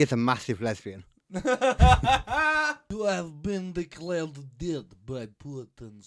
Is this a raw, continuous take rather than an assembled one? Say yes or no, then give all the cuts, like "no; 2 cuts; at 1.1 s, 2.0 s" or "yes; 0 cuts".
no; 1 cut; at 2.9 s